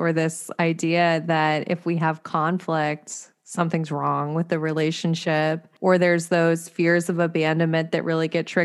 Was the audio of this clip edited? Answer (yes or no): yes